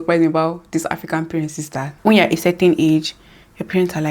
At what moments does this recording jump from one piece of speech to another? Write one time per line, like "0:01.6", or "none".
0:01.9